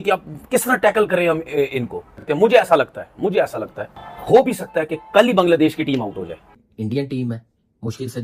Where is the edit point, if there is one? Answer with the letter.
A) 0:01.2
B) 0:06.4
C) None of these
B